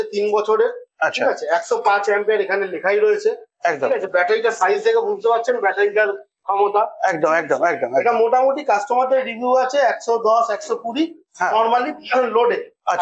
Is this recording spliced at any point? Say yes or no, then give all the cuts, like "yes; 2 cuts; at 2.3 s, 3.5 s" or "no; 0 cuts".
no; 0 cuts